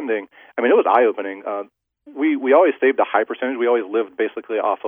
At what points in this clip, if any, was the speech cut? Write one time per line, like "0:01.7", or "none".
none